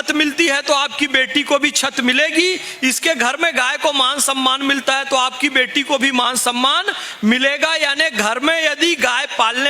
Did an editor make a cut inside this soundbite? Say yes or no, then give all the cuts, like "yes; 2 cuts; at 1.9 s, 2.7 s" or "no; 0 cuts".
no; 0 cuts